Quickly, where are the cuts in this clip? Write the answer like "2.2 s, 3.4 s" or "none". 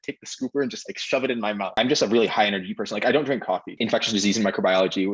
1.7 s, 3.8 s